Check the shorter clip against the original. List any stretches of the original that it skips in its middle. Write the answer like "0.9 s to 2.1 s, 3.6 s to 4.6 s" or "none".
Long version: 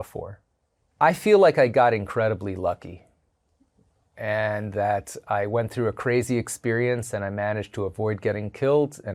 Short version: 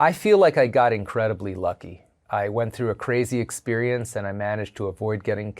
3.2 s to 5.1 s